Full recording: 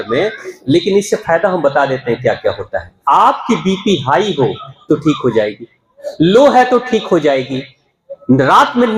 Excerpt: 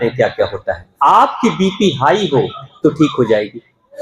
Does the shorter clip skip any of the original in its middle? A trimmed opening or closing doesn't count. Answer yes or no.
no